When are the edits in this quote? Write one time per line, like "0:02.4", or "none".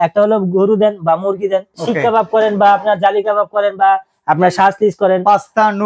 0:01.7